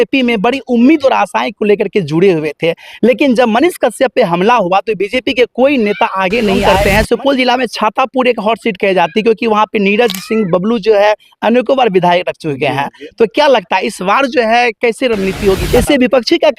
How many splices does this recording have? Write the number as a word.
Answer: two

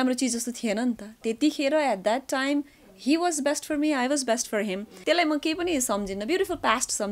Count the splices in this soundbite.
one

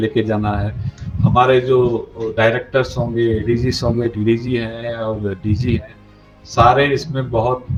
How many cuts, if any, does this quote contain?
zero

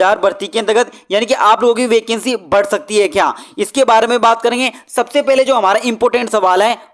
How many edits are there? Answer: zero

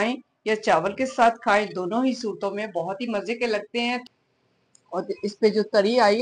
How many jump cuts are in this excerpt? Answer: one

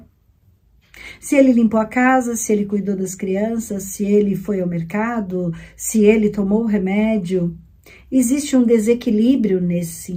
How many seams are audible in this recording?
zero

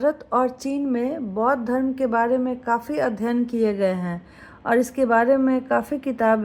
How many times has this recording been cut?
zero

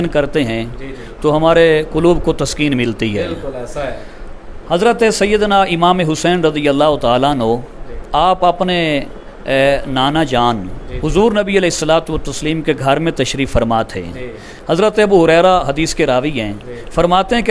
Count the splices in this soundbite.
zero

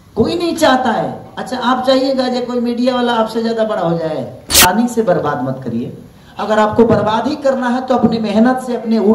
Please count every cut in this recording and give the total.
one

